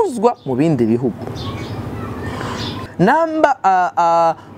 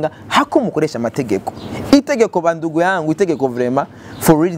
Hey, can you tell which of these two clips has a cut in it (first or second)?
first